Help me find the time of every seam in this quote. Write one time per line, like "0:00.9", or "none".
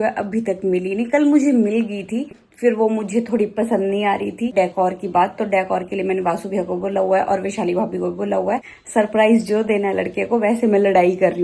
0:02.4
0:04.5
0:08.7